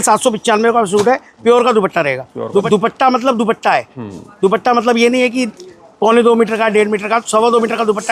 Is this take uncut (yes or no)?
no